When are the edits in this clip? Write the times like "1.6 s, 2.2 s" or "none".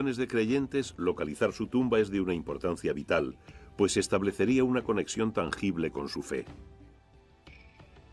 4.5 s